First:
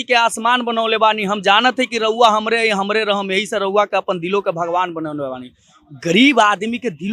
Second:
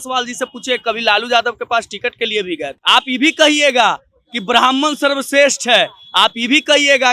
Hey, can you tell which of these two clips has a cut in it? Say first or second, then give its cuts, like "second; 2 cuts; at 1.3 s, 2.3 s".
second; 1 cut; at 2.7 s